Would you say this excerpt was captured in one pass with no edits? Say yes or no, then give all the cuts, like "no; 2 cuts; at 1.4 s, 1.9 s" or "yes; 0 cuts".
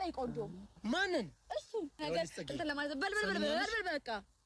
no; 1 cut; at 2.0 s